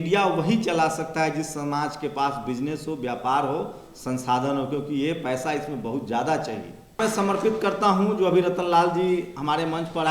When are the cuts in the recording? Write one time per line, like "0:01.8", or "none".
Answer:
0:07.0